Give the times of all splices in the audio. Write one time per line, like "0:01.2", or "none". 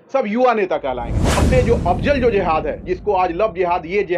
0:01.4